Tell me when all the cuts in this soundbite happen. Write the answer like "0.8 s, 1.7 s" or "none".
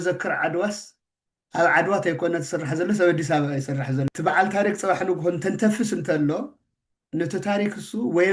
4.1 s